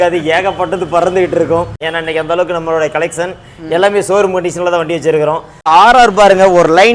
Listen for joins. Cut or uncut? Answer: cut